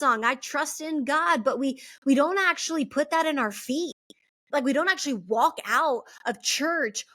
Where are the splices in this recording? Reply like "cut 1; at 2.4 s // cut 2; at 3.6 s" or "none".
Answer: none